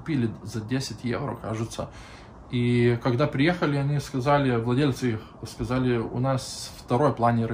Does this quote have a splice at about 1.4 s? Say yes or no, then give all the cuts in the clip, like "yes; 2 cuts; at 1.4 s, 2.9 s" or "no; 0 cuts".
no; 0 cuts